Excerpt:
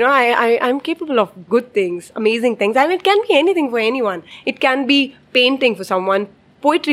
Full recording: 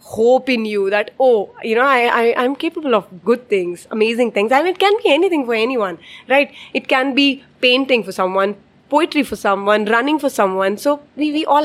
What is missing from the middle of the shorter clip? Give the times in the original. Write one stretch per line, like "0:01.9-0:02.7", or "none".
0:06.1-0:06.6